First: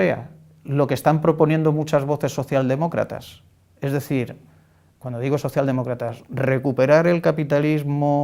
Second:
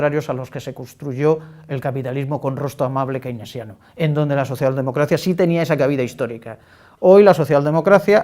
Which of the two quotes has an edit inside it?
second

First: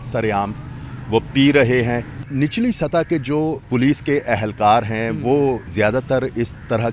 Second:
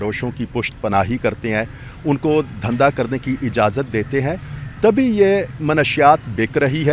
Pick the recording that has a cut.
first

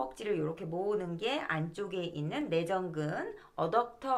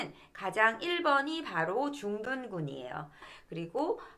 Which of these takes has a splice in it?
second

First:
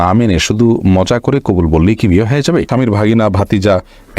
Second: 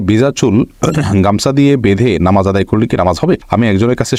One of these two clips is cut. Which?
first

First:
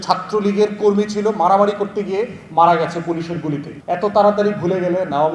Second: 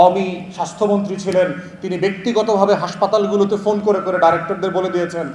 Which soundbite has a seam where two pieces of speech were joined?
first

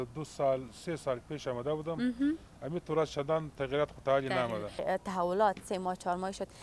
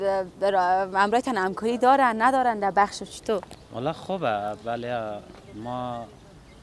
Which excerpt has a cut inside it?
first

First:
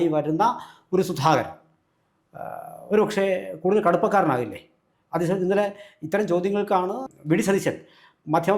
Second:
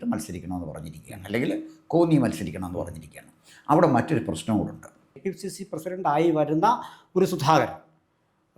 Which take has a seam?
second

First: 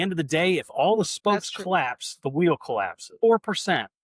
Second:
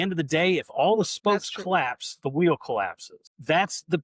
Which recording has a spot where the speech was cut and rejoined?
first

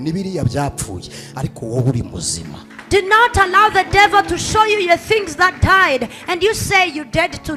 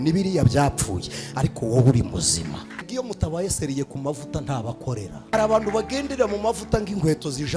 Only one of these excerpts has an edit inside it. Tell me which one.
second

